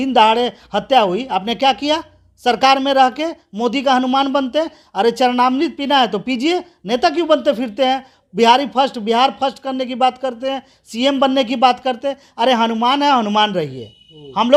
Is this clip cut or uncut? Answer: uncut